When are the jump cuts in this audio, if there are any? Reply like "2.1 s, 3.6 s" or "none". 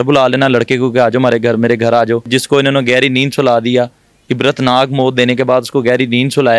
2.3 s